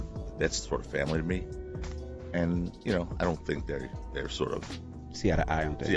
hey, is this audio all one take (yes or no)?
yes